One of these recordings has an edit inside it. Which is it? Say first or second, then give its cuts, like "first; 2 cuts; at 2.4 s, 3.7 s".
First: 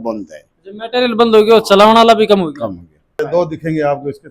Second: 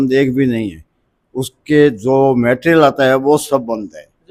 first; 1 cut; at 3.2 s